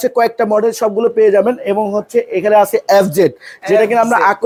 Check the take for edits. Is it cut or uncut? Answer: uncut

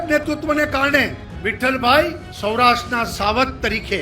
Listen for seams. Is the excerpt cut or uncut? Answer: cut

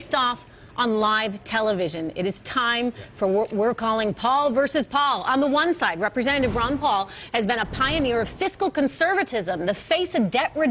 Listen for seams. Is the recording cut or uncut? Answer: uncut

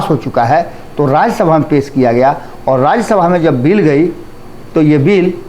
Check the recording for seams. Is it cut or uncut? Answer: uncut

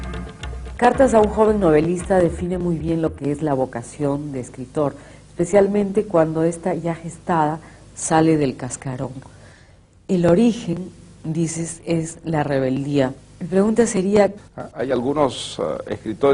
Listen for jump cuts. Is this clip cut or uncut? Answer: uncut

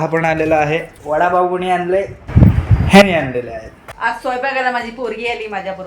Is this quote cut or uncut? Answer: cut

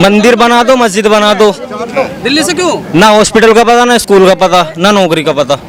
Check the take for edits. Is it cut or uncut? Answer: uncut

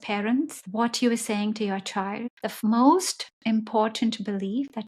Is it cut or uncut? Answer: cut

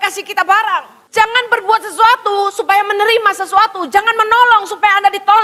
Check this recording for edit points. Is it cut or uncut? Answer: cut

